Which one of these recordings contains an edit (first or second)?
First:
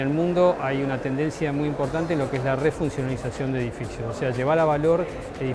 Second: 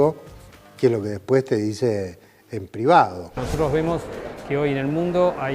second